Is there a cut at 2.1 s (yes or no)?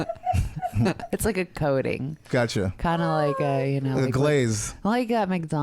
yes